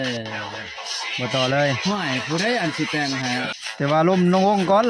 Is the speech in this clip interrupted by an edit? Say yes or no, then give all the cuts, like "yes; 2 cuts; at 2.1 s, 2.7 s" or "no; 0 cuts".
yes; 1 cut; at 3.6 s